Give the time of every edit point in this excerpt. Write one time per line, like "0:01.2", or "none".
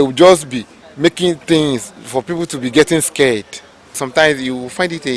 0:04.0